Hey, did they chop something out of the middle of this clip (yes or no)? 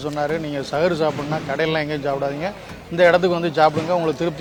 no